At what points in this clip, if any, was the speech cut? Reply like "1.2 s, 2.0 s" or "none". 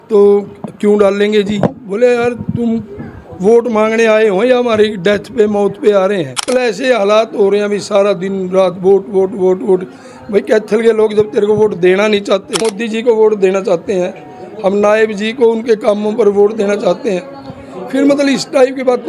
6.4 s, 12.6 s